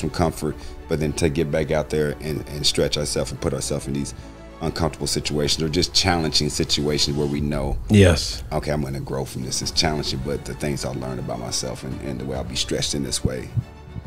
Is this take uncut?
yes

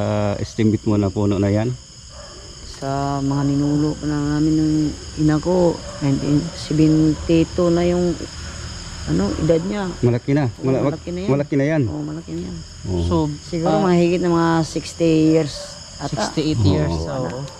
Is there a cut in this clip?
no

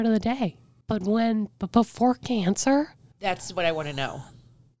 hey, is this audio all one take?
no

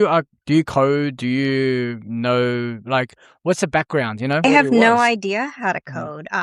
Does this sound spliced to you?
yes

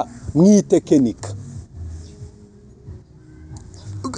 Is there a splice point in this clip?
no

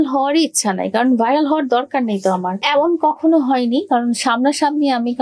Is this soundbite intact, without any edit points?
no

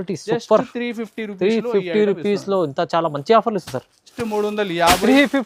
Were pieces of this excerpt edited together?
yes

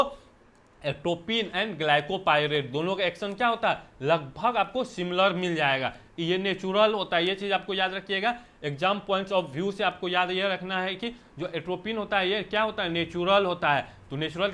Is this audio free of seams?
yes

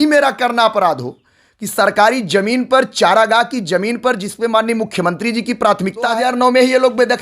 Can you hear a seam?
yes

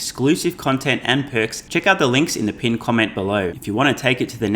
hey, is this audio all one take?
no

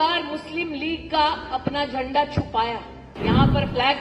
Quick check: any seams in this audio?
yes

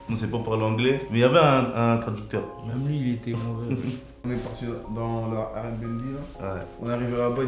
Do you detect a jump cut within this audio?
yes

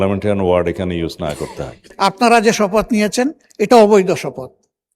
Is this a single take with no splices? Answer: no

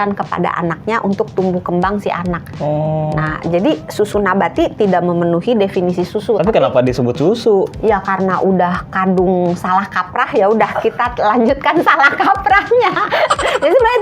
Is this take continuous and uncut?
yes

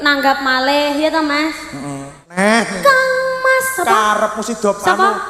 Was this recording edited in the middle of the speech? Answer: yes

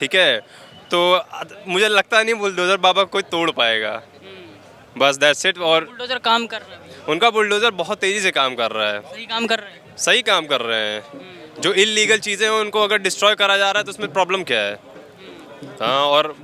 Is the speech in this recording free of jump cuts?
yes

